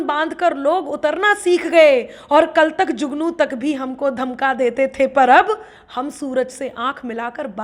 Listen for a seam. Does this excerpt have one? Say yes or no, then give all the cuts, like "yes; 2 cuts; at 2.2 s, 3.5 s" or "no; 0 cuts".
no; 0 cuts